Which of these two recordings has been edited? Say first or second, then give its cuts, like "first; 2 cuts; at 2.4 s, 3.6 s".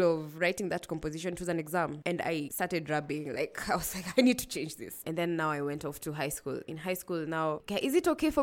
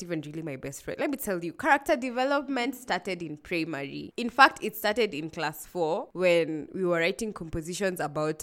first; 2 cuts; at 2.2 s, 5.0 s